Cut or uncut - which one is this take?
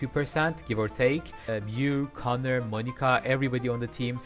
cut